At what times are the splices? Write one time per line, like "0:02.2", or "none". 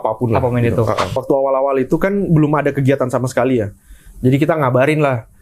0:01.2